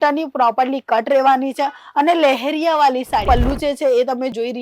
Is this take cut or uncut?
cut